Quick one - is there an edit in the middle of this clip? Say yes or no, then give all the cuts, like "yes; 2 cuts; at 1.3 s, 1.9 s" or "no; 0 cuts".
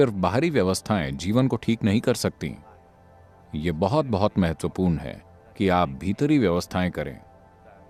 no; 0 cuts